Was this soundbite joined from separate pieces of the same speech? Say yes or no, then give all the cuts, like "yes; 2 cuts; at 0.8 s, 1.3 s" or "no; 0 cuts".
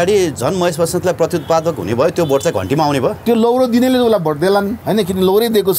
yes; 2 cuts; at 3.2 s, 4.8 s